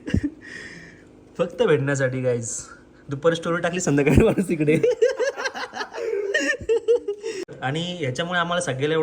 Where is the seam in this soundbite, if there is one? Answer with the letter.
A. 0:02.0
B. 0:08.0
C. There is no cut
B